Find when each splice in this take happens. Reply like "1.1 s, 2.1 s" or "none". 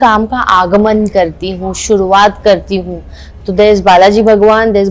none

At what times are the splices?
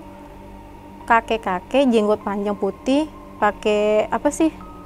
none

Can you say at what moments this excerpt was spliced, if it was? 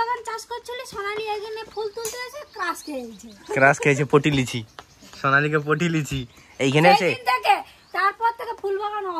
none

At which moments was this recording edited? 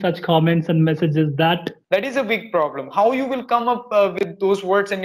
1.7 s

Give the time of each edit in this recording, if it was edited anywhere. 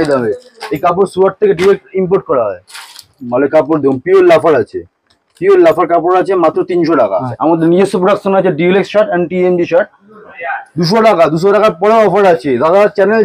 3.1 s, 7.3 s, 10.3 s

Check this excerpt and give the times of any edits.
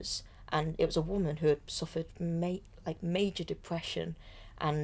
none

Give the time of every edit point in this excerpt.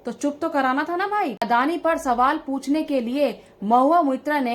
1.4 s

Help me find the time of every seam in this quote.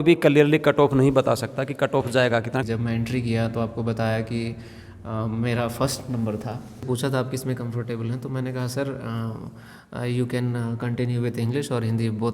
2.6 s, 6.8 s

